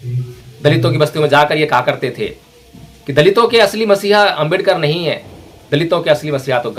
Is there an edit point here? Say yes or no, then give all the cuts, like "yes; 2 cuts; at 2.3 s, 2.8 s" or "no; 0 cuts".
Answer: no; 0 cuts